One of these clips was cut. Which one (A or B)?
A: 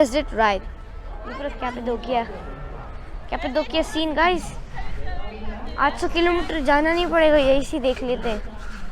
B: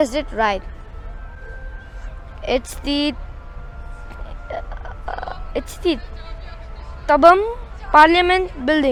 A